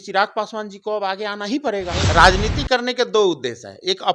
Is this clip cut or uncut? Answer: cut